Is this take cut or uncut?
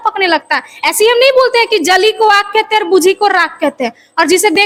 uncut